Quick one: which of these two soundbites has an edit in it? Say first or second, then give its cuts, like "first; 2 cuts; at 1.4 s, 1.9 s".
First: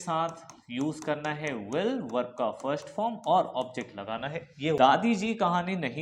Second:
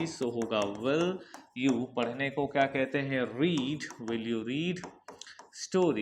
first; 1 cut; at 4.8 s